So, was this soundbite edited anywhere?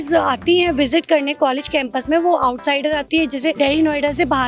no; 0 cuts

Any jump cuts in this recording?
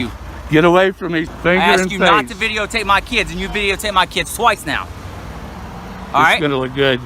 yes; 1 cut; at 1.3 s

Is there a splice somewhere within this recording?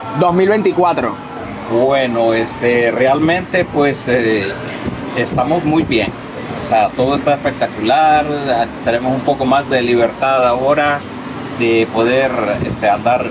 no; 0 cuts

